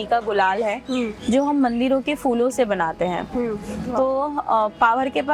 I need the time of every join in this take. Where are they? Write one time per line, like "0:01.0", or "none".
none